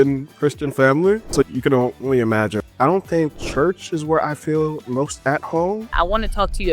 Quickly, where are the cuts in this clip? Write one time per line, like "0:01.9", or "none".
0:01.5
0:02.6
0:03.4
0:05.9